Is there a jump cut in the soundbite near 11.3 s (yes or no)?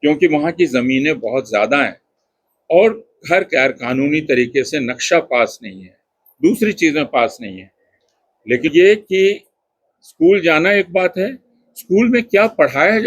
no